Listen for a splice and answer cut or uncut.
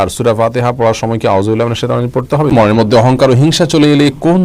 cut